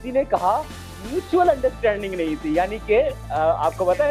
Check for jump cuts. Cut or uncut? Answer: uncut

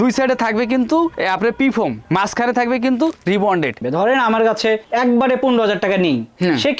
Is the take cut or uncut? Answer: cut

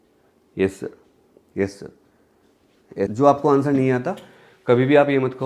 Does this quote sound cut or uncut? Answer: cut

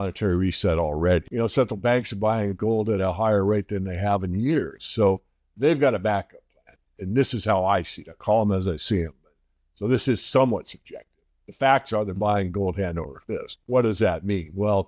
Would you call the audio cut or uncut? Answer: cut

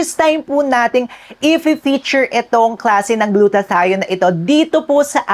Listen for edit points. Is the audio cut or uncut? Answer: uncut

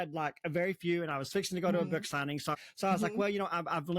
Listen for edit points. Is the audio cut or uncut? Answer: cut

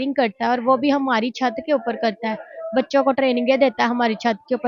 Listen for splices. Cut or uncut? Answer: uncut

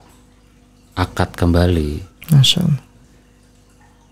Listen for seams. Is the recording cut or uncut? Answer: uncut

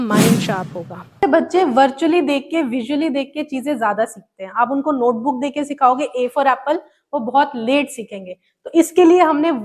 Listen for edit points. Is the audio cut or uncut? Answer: cut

